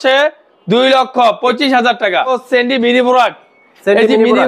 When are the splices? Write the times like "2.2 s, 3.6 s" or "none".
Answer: 2.3 s